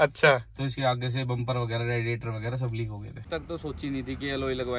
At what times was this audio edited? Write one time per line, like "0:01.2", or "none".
0:03.3